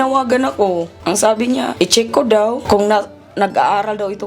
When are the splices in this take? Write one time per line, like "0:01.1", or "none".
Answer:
0:00.9
0:01.7
0:02.6